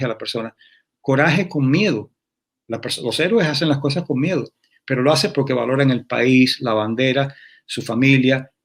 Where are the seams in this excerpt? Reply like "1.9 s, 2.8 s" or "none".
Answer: none